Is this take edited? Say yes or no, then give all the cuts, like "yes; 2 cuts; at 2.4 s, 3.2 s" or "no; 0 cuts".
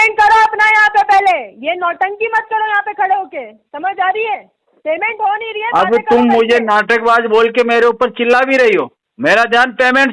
yes; 1 cut; at 9.0 s